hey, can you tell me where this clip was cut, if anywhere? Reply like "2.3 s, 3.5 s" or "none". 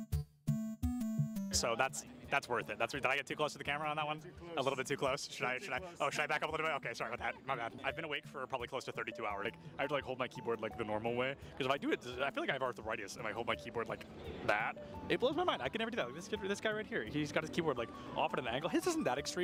none